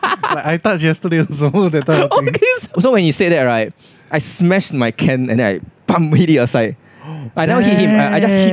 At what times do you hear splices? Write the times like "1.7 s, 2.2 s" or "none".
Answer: 2.7 s